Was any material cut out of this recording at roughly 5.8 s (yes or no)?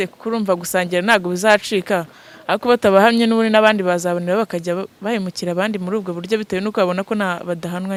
no